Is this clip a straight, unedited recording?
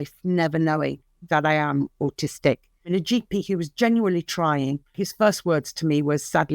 no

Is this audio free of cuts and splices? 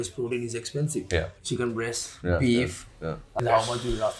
no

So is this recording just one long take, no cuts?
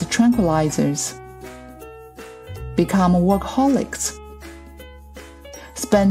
yes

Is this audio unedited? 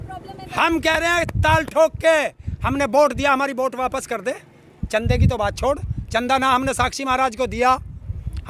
yes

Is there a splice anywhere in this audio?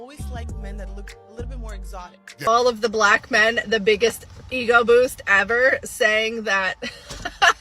yes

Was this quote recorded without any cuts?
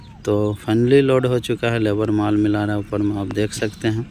yes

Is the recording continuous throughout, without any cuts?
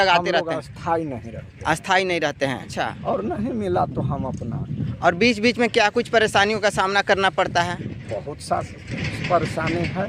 no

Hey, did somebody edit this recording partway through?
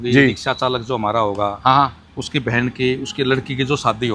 no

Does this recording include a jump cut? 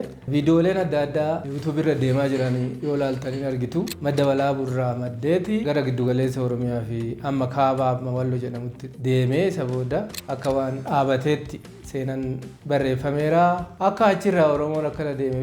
yes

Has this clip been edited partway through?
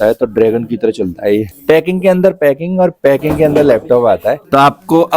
yes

